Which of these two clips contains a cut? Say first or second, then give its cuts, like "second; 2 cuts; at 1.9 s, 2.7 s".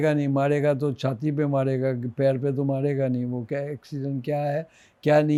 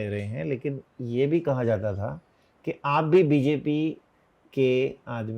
second; 1 cut; at 0.9 s